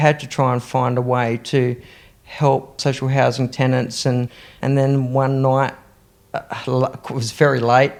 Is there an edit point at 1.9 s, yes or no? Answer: no